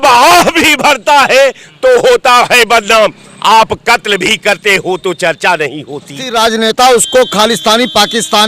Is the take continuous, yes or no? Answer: no